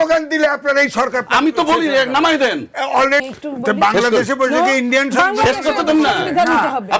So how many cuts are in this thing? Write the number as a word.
one